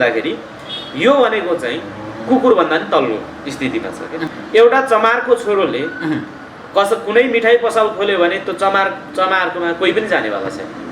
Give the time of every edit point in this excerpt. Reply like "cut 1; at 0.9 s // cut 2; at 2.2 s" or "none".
cut 1; at 4.3 s